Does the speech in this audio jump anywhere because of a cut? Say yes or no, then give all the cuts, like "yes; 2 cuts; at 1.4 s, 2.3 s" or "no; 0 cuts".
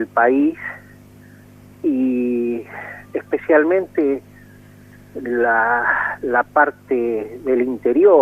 no; 0 cuts